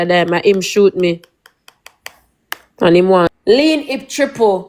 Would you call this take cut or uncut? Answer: cut